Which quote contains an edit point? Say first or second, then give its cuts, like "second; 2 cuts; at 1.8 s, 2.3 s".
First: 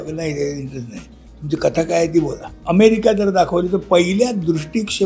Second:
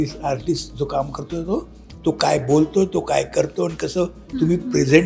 first; 1 cut; at 2.5 s